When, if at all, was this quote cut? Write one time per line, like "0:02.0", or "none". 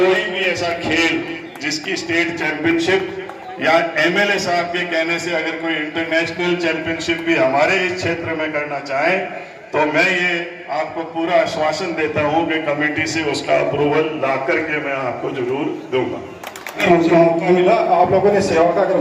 0:16.8